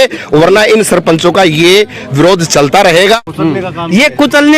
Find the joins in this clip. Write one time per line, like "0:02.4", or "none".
0:03.3